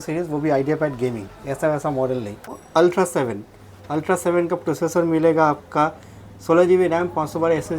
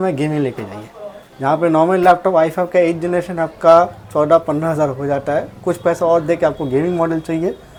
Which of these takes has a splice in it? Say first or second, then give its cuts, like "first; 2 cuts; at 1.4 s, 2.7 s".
first; 1 cut; at 2.6 s